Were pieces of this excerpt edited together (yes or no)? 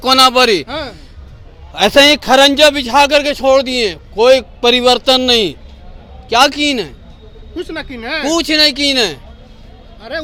no